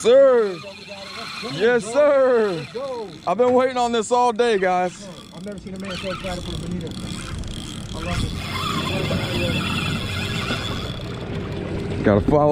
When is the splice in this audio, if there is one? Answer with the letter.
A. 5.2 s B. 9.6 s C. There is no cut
C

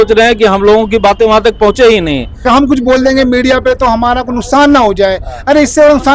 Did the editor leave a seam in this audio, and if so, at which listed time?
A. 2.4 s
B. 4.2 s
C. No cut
A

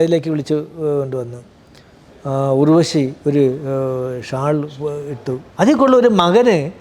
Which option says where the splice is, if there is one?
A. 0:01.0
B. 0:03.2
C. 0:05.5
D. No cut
C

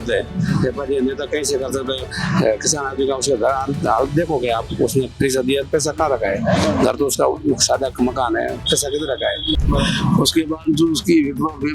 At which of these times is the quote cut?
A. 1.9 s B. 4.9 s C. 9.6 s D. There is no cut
C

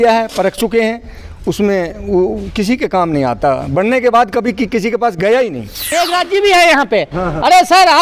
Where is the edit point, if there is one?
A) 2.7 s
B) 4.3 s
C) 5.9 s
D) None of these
C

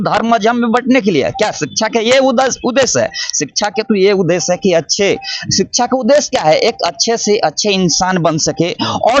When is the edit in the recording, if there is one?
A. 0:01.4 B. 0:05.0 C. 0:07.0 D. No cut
D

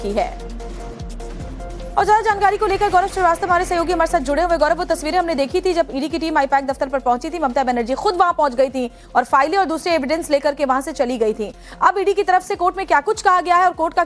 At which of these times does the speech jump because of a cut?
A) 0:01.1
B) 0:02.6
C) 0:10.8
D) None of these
B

